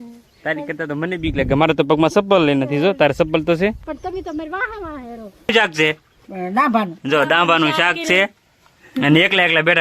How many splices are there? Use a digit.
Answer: 1